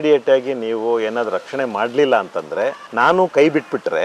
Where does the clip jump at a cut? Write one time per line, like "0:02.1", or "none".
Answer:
0:02.8